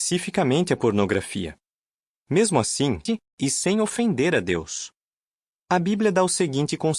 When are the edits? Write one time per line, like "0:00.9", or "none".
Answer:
none